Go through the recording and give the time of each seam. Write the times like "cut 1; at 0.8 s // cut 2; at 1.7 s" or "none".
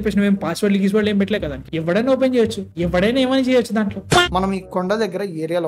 cut 1; at 4.0 s